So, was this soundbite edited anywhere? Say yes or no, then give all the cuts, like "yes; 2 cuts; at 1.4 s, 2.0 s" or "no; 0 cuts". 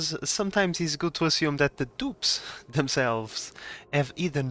no; 0 cuts